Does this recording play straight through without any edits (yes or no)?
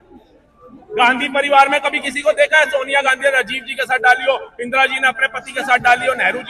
yes